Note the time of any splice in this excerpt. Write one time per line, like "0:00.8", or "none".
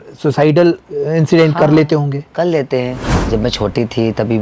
0:03.1